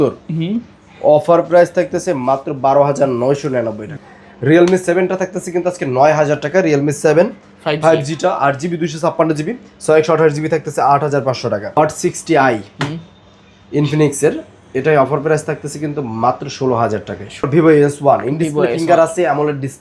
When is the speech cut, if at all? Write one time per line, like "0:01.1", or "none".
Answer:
0:03.9
0:11.8
0:17.4